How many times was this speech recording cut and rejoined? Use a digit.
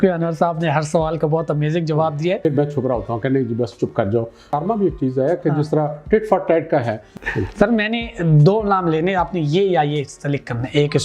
3